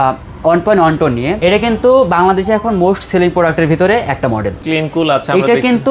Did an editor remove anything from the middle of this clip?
yes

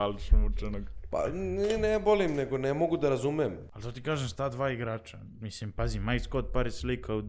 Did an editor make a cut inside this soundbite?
yes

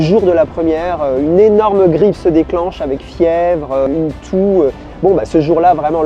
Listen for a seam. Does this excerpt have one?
yes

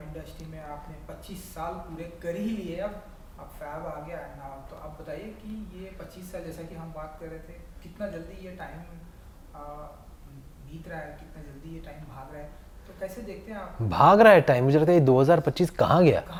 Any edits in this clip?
no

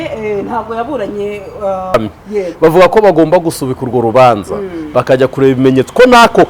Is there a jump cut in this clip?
yes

